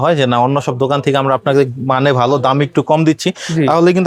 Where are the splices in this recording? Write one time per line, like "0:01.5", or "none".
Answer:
none